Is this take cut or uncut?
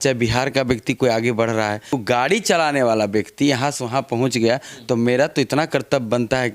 cut